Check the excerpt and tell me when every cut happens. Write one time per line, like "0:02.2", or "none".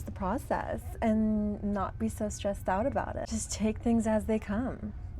0:03.2